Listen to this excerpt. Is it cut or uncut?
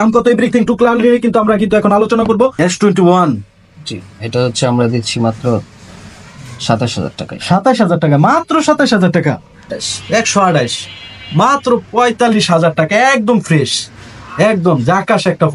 cut